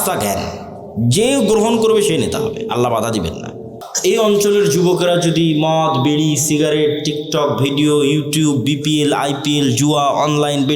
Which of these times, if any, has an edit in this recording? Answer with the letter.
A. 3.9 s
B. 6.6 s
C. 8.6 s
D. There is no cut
A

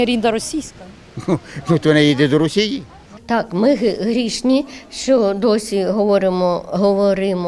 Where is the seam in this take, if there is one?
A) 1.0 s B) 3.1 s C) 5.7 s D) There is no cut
B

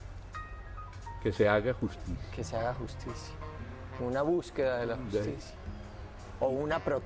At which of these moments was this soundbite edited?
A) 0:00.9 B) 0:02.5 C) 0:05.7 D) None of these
D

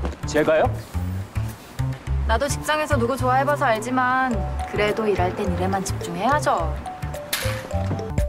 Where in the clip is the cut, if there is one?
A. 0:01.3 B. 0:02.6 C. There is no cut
C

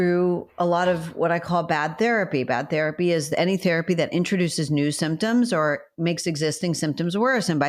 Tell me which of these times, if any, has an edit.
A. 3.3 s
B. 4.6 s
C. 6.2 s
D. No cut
A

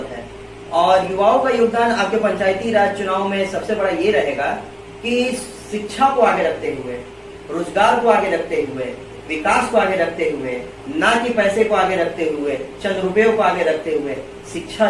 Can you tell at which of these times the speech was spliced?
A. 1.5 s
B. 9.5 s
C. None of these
C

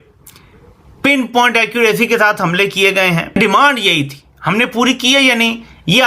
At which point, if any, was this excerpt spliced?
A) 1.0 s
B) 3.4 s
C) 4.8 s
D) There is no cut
B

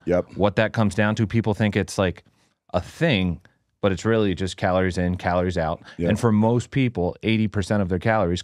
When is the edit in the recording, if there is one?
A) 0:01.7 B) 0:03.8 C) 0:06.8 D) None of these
D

